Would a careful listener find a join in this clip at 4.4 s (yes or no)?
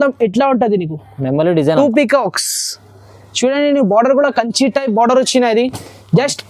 no